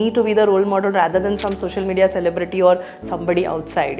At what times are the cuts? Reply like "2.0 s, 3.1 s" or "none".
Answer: none